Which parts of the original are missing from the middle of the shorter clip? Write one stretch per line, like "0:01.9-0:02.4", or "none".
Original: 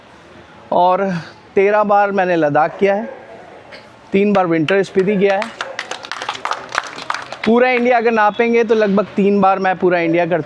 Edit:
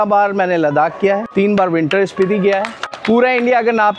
0:03.0-0:04.0
0:05.6-0:07.2